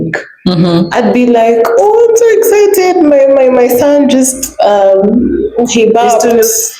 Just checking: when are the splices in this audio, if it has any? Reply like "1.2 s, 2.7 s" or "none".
none